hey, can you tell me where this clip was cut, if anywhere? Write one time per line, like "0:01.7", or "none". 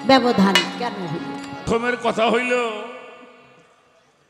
0:01.6